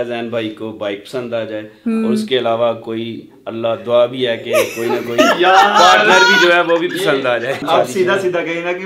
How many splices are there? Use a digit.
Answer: 1